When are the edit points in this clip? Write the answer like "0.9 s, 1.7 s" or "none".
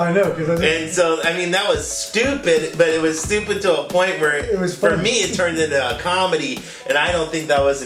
none